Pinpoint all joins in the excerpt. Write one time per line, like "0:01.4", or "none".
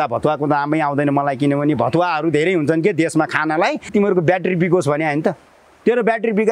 0:03.9

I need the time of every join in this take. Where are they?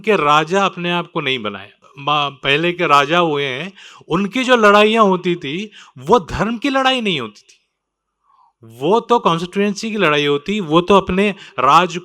0:01.9

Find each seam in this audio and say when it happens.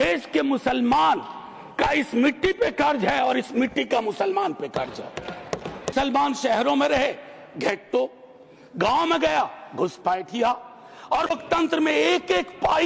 0:05.9
0:11.3

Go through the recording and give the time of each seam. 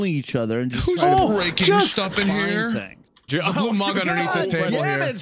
0:03.3

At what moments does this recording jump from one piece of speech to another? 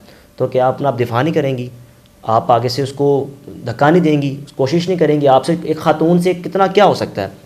none

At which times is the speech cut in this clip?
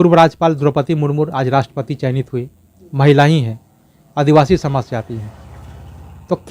none

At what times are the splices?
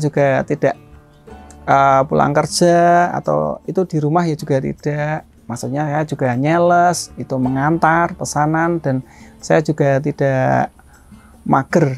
none

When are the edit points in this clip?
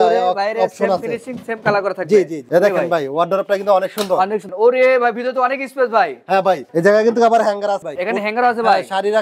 0:02.5
0:04.5
0:06.7

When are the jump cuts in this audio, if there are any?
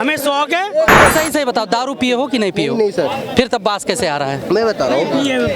0:01.1

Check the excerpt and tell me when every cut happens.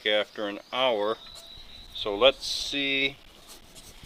none

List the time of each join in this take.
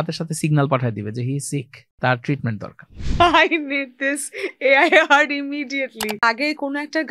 0:01.8
0:03.0
0:06.2

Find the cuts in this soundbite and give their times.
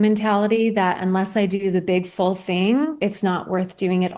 0:02.9

